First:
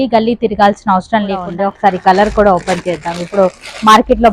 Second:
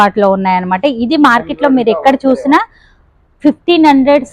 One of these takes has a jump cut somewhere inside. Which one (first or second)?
first